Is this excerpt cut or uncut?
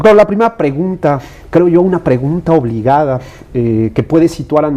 cut